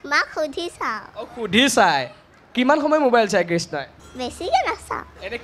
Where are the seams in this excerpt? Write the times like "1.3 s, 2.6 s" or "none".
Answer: 4.0 s